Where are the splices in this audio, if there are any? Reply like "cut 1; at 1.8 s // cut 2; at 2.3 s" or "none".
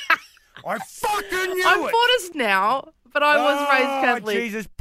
cut 1; at 2.3 s